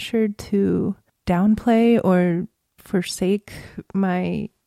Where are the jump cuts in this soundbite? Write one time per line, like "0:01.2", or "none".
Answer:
0:02.8